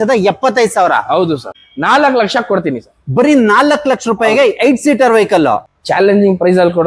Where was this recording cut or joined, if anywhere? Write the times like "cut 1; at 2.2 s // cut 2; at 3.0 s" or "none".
cut 1; at 1.5 s // cut 2; at 5.7 s

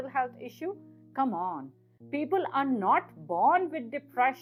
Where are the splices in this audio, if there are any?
none

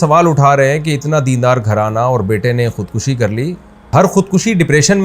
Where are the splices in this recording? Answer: cut 1; at 3.9 s

